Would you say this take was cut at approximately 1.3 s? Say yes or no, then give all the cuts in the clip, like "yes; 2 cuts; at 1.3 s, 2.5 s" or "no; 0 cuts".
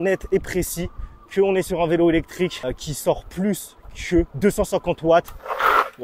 no; 2 cuts; at 2.6 s, 4.3 s